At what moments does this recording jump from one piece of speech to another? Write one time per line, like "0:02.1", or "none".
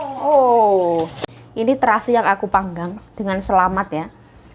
0:01.2